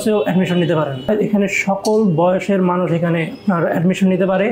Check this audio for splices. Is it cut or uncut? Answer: cut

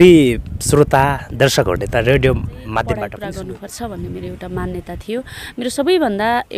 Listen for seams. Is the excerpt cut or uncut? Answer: cut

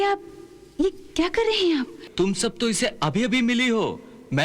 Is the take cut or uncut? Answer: cut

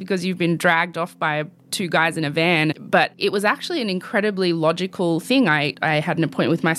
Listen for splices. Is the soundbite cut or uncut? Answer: cut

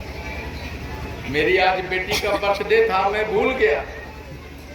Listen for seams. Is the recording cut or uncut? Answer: uncut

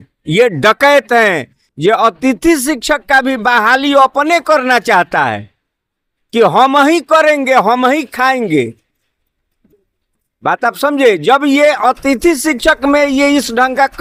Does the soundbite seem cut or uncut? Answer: uncut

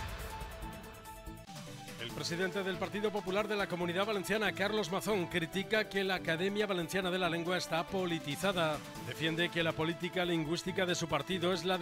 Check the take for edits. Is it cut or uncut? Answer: cut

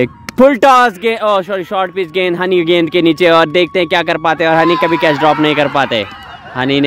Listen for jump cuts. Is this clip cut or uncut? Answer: uncut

